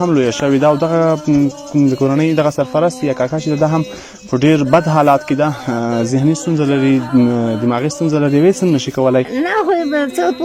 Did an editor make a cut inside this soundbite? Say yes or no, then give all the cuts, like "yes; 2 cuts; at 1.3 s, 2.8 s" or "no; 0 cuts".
yes; 1 cut; at 9.3 s